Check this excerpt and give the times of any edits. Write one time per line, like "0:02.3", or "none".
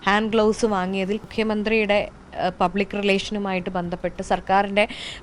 0:01.3